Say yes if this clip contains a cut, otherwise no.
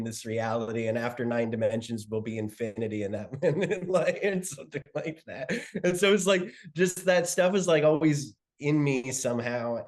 no